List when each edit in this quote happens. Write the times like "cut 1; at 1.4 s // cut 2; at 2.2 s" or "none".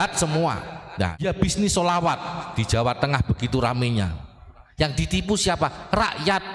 cut 1; at 1.2 s